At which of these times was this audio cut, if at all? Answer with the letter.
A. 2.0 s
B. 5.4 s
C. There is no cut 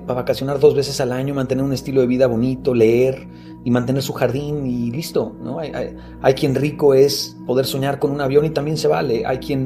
C